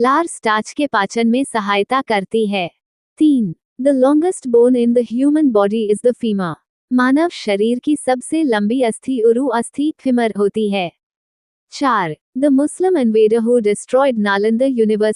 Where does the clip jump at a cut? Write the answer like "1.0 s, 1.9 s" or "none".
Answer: 3.2 s, 11.8 s